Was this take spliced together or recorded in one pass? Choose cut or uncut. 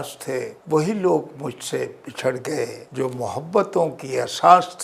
uncut